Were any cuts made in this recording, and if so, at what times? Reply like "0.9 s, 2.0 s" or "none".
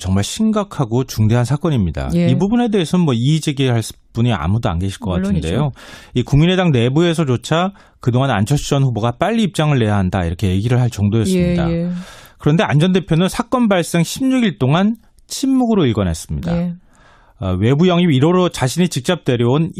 none